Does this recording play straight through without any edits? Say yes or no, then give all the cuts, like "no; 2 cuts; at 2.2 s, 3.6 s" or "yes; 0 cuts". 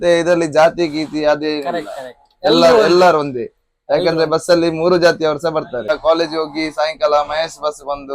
no; 1 cut; at 5.9 s